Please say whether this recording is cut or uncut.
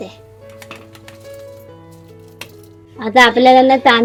uncut